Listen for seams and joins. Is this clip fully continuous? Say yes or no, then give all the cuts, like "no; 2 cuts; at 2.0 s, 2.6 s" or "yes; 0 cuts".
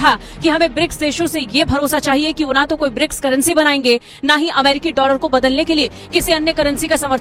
yes; 0 cuts